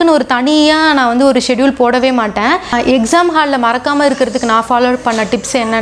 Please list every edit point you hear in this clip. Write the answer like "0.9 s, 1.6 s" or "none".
2.6 s

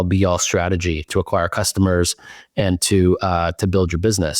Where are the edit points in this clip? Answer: none

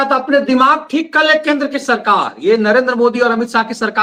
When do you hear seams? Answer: none

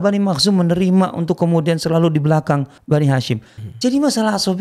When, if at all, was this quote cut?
2.7 s

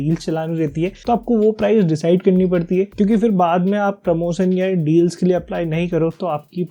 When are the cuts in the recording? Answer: none

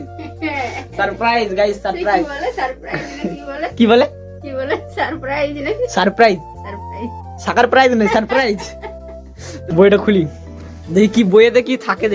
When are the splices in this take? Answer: 9.7 s

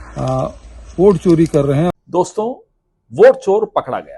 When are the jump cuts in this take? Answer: 1.9 s

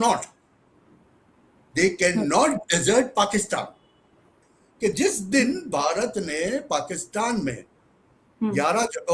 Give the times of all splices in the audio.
4.4 s

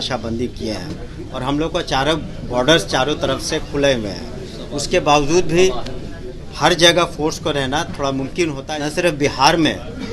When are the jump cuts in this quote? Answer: 8.7 s

